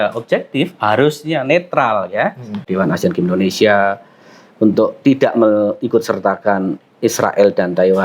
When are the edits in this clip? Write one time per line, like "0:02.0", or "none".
0:02.7